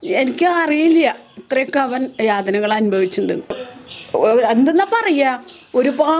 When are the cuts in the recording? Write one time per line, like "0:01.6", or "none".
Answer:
0:03.4